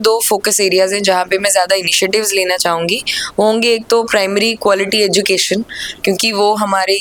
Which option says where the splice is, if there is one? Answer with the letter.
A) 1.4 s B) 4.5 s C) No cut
C